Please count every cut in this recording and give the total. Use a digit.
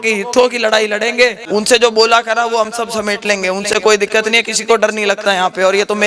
1